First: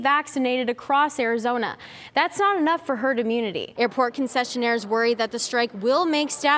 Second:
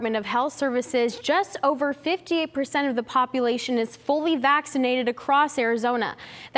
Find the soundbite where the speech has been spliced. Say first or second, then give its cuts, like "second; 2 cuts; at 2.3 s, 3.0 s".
first; 1 cut; at 3.6 s